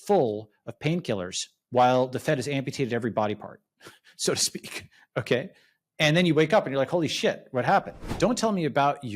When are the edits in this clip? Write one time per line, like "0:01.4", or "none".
0:01.5
0:08.0